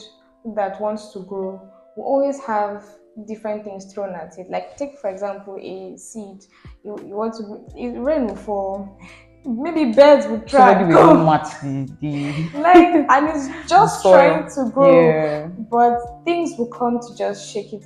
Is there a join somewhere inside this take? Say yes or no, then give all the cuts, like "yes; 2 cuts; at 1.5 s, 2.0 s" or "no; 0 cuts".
no; 0 cuts